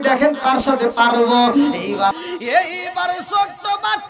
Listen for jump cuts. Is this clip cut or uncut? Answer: cut